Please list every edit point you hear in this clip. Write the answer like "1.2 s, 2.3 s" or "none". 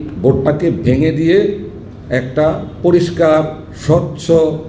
none